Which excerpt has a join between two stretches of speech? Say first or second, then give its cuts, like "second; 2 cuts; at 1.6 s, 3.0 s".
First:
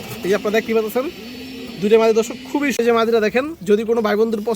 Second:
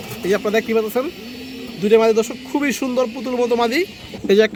first; 1 cut; at 2.8 s